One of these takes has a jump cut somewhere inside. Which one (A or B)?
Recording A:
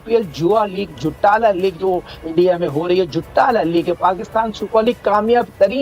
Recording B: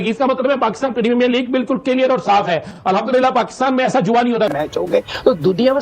B